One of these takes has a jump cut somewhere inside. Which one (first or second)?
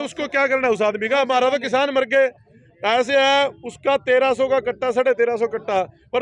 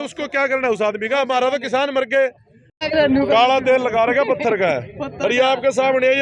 second